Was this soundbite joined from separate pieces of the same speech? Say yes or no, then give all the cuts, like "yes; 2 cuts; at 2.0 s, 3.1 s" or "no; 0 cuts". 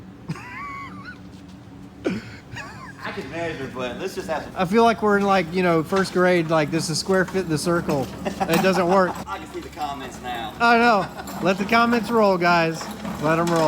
yes; 2 cuts; at 4.5 s, 9.2 s